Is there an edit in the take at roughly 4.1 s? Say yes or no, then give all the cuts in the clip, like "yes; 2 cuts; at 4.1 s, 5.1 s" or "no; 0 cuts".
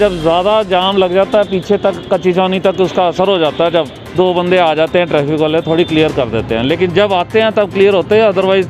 yes; 1 cut; at 4.1 s